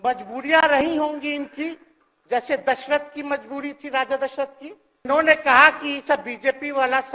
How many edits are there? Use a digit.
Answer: 1